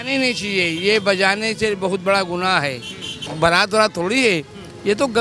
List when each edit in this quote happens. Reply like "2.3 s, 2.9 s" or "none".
3.2 s